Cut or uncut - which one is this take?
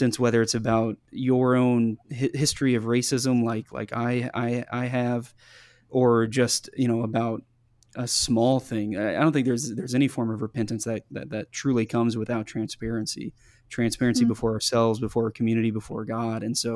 cut